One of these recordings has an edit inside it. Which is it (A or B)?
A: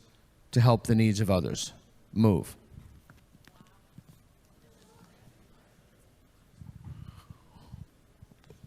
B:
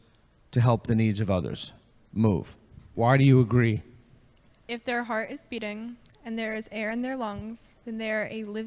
B